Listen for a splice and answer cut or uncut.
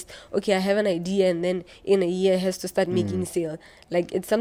uncut